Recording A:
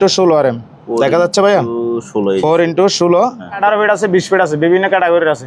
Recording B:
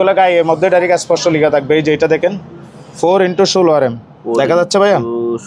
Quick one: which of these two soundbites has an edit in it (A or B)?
A